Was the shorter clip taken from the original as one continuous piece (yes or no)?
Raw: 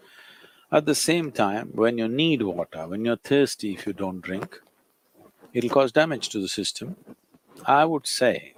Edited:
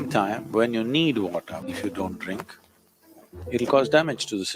no